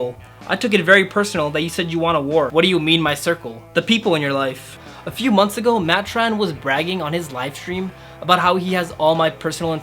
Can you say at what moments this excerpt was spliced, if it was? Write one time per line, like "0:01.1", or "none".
0:02.5
0:04.8

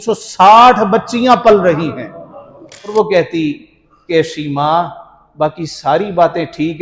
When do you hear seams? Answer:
0:02.9

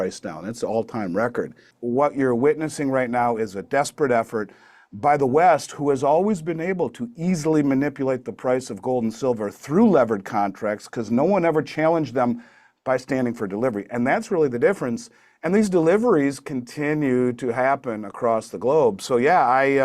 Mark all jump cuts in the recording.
0:01.7

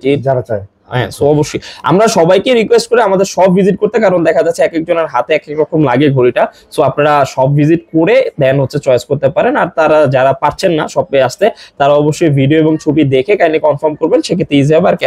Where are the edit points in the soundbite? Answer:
none

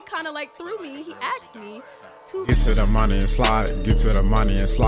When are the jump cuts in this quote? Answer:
0:02.5

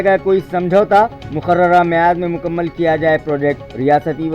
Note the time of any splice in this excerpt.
none

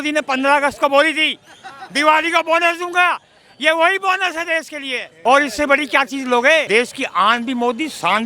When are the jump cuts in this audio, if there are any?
0:05.0
0:06.7

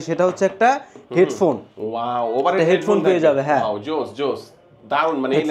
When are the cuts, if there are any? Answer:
none

